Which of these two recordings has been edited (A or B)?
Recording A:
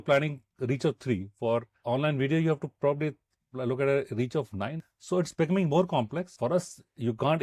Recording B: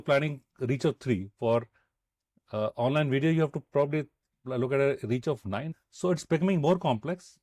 A